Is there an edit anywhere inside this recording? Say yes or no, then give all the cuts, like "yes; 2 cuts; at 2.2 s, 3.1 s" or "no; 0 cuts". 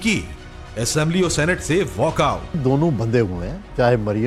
yes; 1 cut; at 2.5 s